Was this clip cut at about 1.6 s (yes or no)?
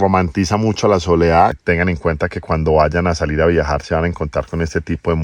yes